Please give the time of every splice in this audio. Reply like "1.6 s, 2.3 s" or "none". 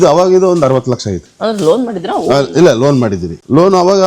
1.2 s